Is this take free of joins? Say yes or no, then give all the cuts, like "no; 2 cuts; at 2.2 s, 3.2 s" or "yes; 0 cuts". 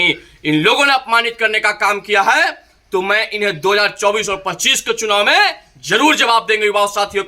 yes; 0 cuts